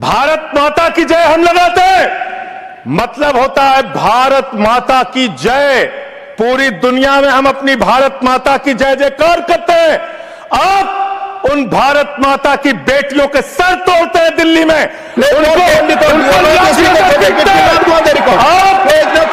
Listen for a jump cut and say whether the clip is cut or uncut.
uncut